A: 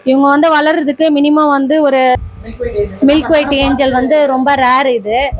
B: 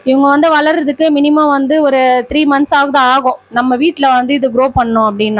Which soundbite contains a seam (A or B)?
A